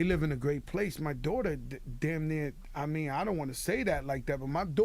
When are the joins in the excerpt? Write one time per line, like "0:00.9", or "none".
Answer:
none

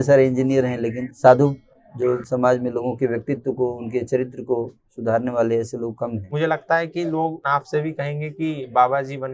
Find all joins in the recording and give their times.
0:01.0
0:02.2
0:06.3
0:07.4

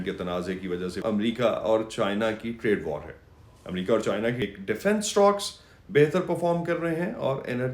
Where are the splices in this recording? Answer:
0:01.0
0:04.4

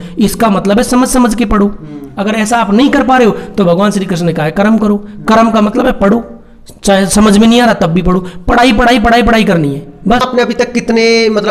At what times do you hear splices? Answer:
0:10.3

